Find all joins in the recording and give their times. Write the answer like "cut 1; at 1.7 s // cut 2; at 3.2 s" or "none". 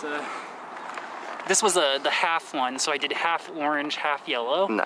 none

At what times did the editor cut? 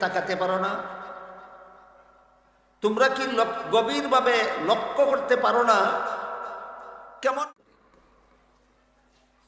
cut 1; at 7.4 s

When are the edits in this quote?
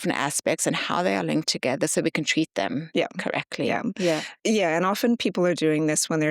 cut 1; at 4.3 s

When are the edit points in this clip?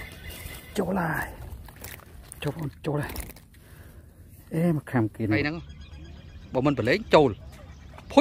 cut 1; at 5.4 s

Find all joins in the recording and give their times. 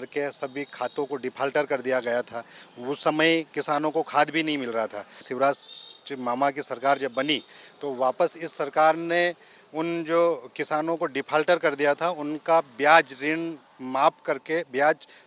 cut 1; at 5.3 s

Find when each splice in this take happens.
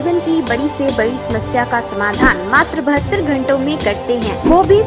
none

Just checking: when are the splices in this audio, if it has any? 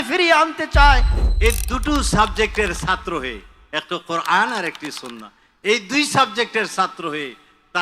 cut 1; at 1.1 s

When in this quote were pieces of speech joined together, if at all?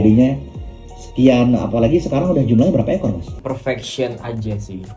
cut 1; at 3.3 s

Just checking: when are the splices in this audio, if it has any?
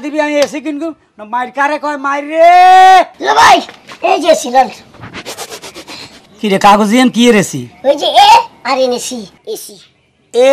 cut 1; at 3.2 s

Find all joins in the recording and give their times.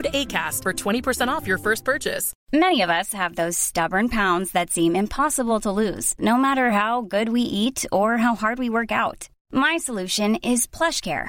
cut 1; at 2.3 s

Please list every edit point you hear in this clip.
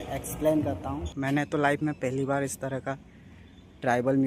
cut 1; at 1.1 s

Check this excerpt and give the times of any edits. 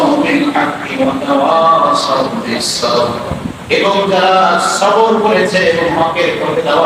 none

